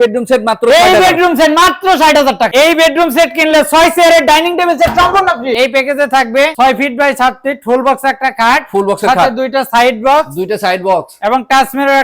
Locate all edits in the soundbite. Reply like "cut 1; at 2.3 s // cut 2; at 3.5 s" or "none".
cut 1; at 2.5 s // cut 2; at 5.5 s